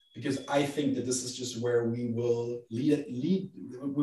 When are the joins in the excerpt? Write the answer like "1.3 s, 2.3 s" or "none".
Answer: none